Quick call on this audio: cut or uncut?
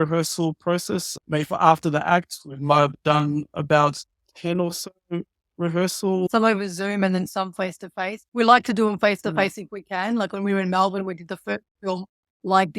cut